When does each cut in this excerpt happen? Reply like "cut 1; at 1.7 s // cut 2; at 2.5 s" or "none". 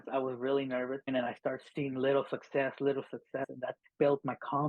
cut 1; at 1.1 s // cut 2; at 3.5 s